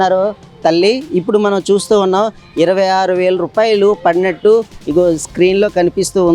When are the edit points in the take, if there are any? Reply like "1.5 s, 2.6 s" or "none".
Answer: none

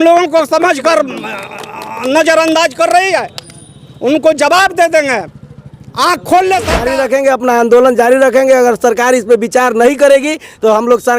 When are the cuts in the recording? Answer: 6.8 s

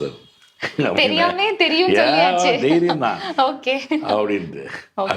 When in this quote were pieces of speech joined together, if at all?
none

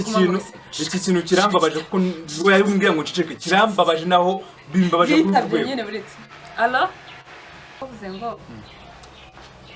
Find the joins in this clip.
7.8 s

